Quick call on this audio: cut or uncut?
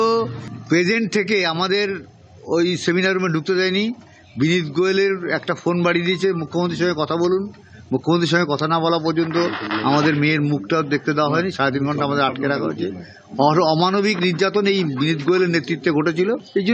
uncut